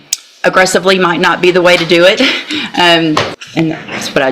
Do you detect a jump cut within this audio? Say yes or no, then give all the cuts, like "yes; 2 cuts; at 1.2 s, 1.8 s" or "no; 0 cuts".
yes; 1 cut; at 3.4 s